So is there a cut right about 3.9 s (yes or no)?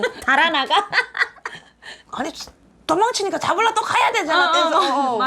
no